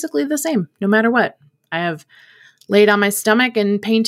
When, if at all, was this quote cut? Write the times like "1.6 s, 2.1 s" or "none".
none